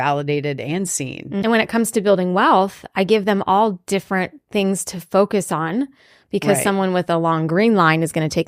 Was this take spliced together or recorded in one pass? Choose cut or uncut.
cut